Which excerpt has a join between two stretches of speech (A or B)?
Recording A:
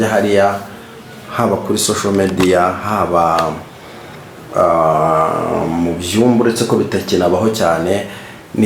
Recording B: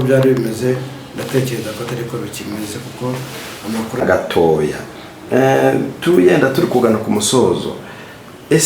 B